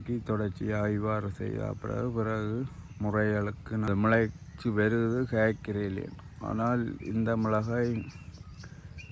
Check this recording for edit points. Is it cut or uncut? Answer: cut